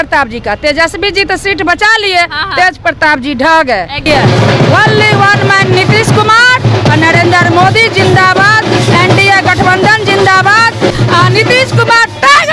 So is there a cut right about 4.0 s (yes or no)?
yes